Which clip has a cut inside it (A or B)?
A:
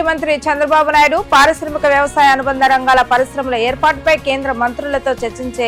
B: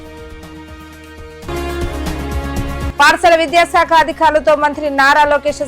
B